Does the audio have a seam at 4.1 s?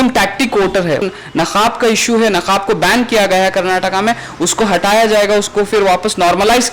no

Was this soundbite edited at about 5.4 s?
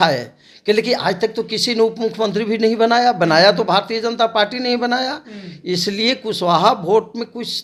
no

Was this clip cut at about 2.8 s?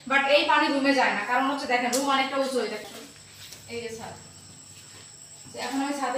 yes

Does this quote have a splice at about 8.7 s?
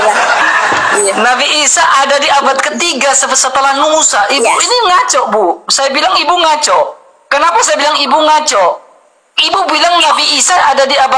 no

